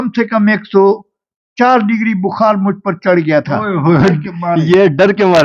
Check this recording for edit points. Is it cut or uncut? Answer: uncut